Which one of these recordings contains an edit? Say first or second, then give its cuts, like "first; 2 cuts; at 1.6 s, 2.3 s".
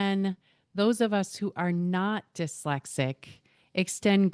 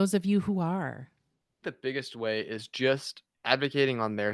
second; 1 cut; at 1.5 s